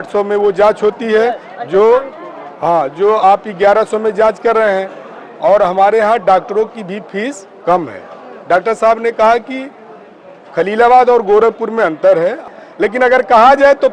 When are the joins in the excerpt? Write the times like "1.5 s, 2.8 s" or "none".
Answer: 12.4 s